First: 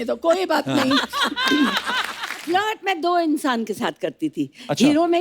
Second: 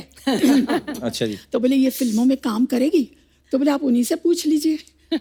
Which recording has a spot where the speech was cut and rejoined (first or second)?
first